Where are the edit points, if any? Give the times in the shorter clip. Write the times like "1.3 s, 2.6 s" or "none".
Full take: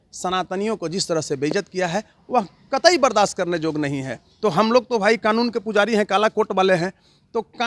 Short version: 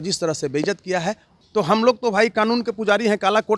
1.3 s